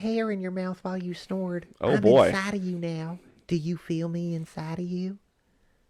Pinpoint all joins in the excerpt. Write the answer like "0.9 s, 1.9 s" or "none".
none